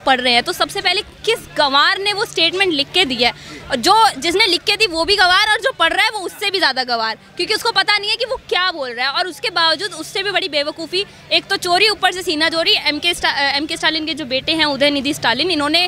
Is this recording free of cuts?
yes; 0 cuts

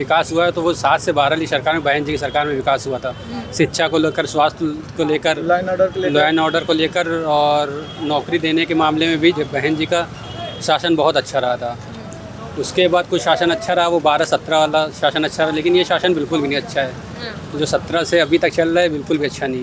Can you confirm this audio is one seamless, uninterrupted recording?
yes; 0 cuts

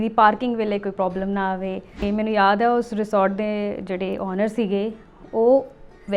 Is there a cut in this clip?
yes; 1 cut; at 2.0 s

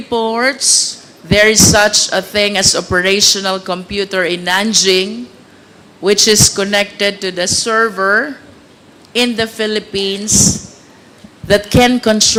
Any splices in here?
no; 0 cuts

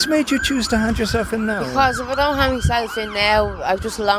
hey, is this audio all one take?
yes; 0 cuts

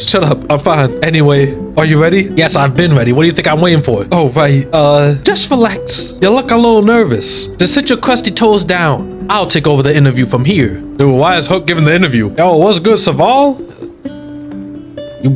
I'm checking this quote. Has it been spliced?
yes; 1 cut; at 12.3 s

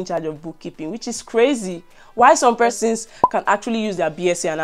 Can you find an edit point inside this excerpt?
no; 0 cuts

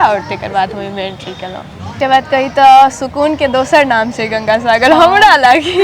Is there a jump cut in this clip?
yes; 1 cut; at 1.9 s

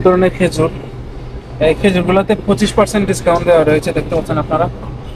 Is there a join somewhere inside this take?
no; 0 cuts

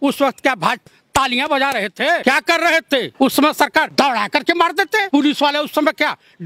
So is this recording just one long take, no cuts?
no; 5 cuts; at 0.9 s, 2.2 s, 3.1 s, 3.9 s, 5.0 s

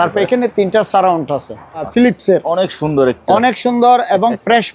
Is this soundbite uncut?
no; 1 cut; at 1.9 s

